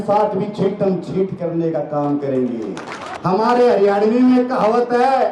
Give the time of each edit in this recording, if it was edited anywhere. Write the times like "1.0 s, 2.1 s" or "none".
3.1 s